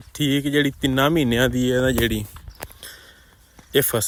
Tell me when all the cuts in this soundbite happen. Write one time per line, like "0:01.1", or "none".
none